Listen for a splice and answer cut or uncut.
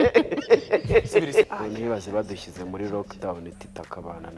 cut